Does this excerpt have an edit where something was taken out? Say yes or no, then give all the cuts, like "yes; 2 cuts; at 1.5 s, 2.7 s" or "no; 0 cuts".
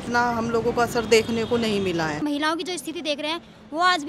yes; 1 cut; at 2.2 s